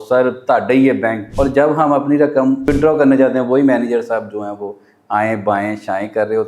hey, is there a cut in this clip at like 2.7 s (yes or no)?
yes